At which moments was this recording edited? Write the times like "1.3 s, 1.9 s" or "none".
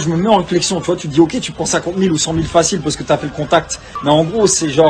none